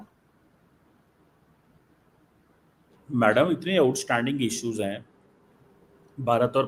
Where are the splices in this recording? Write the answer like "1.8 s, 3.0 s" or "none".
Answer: none